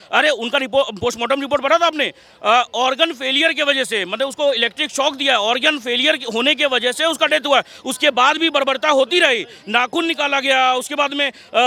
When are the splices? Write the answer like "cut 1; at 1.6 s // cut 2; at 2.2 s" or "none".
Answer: none